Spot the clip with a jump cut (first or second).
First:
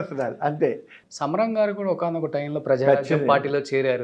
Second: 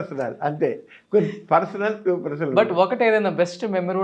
first